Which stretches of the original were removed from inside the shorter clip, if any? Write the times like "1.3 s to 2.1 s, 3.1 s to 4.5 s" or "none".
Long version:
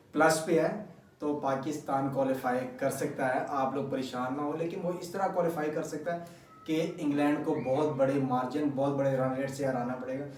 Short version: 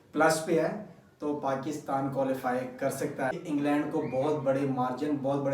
3.3 s to 6.9 s